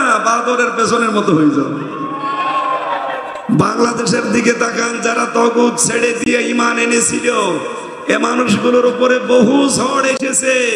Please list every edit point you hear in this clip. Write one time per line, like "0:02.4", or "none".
0:03.3